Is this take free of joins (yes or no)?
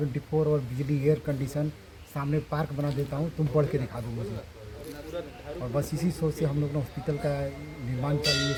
yes